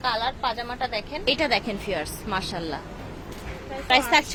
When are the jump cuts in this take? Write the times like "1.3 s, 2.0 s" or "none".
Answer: none